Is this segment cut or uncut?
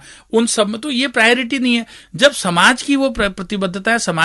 uncut